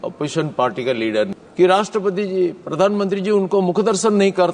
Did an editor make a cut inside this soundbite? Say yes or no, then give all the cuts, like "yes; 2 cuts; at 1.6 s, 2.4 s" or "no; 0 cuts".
yes; 1 cut; at 1.3 s